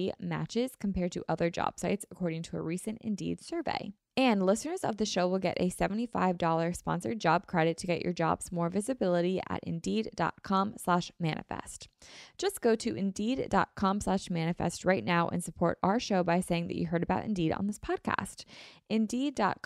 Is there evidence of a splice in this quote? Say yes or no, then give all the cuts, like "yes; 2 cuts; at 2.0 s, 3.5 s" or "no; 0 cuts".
yes; 1 cut; at 4.0 s